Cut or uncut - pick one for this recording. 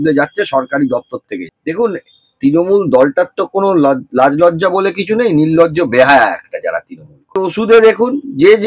cut